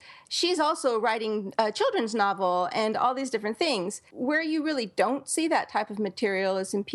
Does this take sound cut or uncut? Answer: cut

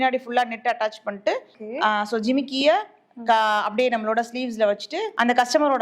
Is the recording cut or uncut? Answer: cut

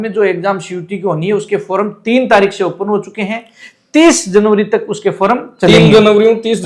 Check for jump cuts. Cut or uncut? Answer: uncut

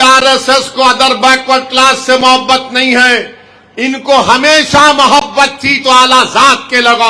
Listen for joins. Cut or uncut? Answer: uncut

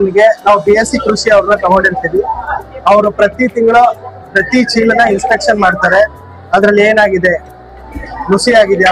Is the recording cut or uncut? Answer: uncut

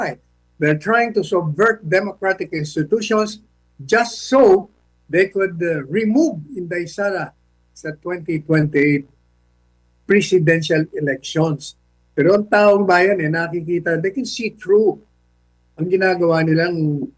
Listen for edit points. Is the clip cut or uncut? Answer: uncut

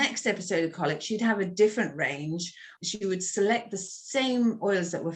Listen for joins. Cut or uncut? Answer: cut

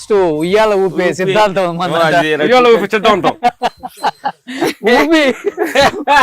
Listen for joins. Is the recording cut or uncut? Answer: uncut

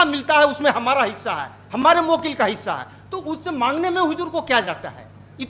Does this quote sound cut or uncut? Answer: uncut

